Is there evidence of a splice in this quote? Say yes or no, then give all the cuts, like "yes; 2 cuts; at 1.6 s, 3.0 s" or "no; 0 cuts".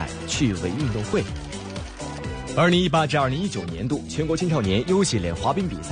yes; 1 cut; at 2.2 s